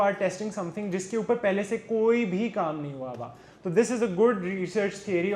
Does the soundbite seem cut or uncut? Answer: uncut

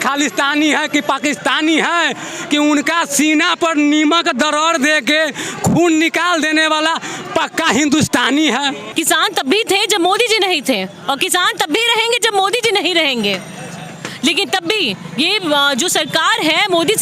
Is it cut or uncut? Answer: cut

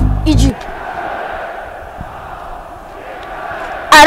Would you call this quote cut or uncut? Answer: uncut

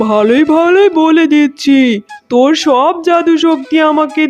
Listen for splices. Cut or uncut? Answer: uncut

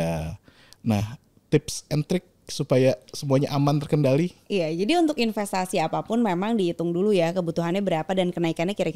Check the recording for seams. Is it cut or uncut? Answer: uncut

